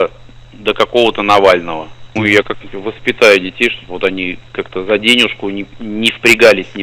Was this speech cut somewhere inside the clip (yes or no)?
yes